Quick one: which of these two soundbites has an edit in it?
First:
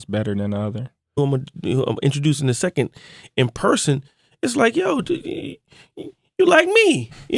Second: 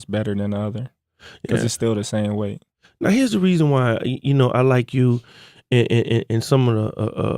second; 1 cut; at 1.2 s

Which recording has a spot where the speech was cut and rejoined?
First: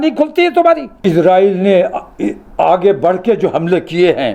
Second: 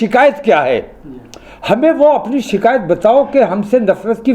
first; 1 cut; at 1.0 s

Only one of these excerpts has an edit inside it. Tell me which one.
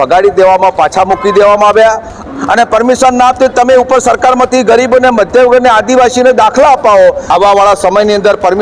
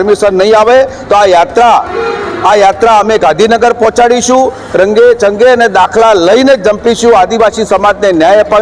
first; 2 cuts; at 2.2 s, 7.2 s

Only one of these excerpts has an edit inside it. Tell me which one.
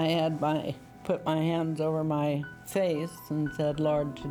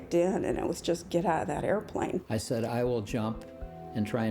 second; 1 cut; at 2.3 s

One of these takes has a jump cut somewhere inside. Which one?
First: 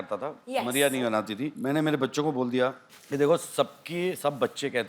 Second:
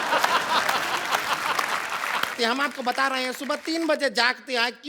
second; 1 cut; at 2.3 s

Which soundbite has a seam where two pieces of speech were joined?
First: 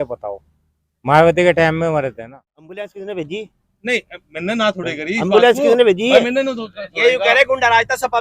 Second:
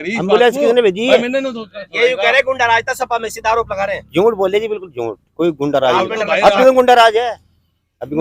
first; 1 cut; at 3.0 s

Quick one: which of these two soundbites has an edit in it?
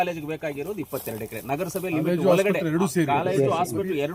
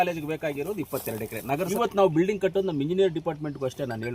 second; 1 cut; at 1.7 s

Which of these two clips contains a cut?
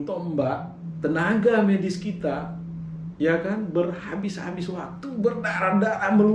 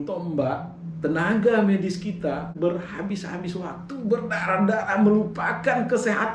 second; 1 cut; at 2.5 s

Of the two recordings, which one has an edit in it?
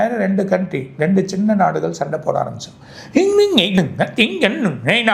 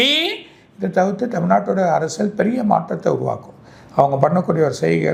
first; 1 cut; at 3.8 s

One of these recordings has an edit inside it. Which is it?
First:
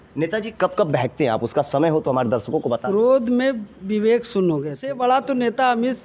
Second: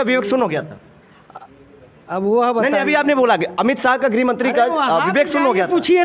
first; 1 cut; at 5.0 s

